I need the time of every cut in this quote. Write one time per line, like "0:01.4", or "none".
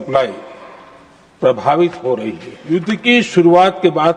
0:02.5

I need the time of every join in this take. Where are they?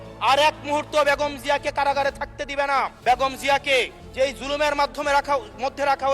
0:02.9
0:04.0

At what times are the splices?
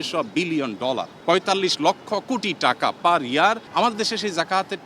0:01.1
0:03.6

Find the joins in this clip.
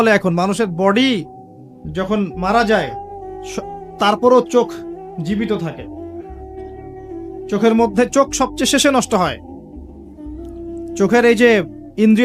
0:09.4
0:11.0

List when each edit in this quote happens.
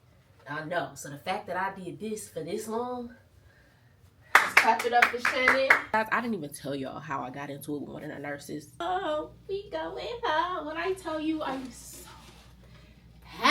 0:05.9
0:08.8

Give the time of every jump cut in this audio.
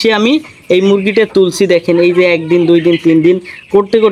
none

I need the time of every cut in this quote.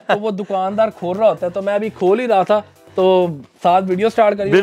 none

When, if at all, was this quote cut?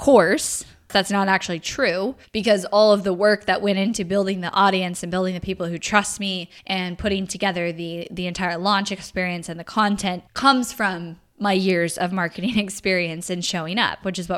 0:00.9
0:02.2
0:06.5
0:10.3

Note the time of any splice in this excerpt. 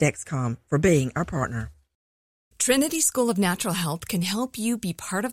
0:02.0

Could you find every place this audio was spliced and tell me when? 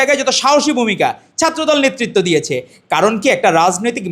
none

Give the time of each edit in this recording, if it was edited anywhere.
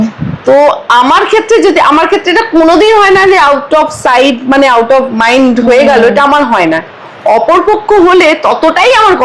none

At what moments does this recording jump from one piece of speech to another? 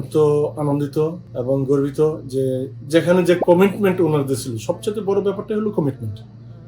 0:01.3

